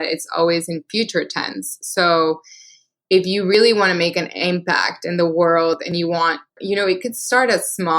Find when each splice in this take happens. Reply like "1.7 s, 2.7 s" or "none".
6.6 s